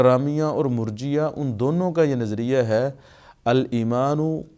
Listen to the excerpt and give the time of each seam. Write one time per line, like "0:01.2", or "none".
none